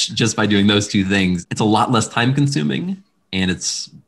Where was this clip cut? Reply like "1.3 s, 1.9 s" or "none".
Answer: 1.4 s